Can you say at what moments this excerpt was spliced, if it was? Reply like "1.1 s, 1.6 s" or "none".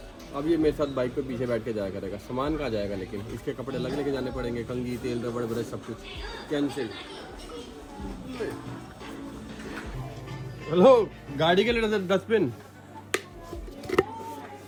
none

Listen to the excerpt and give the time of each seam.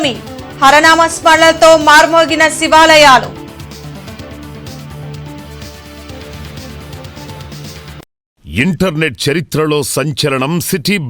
8.5 s

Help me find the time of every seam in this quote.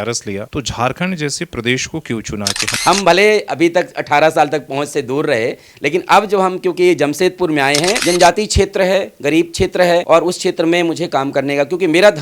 2.7 s, 8.0 s, 10.0 s

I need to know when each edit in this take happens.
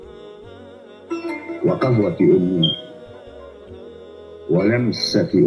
2.8 s, 4.5 s

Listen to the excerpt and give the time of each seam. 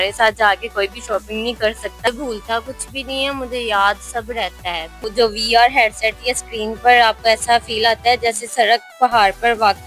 2.1 s, 5.0 s

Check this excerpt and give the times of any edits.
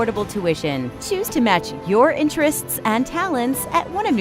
none

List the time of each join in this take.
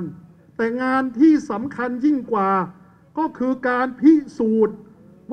none

